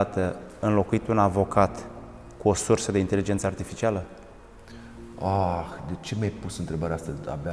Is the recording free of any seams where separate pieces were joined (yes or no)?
yes